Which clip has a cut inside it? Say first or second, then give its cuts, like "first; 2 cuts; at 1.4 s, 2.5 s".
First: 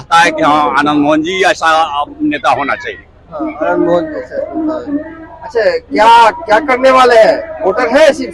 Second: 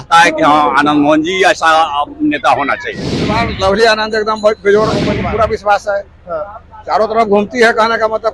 second; 2 cuts; at 3.4 s, 5.2 s